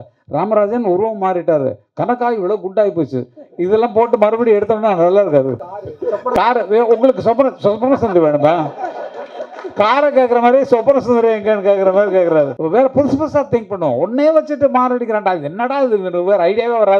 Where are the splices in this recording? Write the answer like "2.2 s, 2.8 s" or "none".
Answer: 5.5 s, 12.6 s

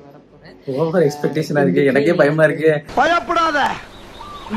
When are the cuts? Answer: none

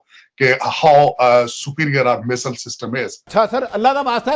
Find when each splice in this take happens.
3.2 s

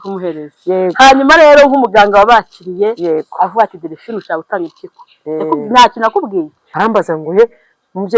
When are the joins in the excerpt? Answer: 6.6 s

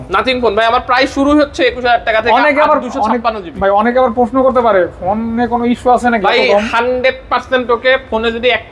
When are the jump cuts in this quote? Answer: none

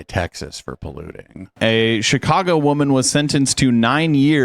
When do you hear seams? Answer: 1.5 s

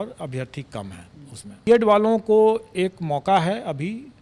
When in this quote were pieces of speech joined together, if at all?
1.7 s

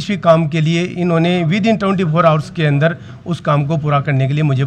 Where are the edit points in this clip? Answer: none

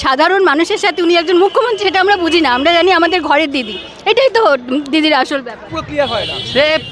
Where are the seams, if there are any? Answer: 5.7 s

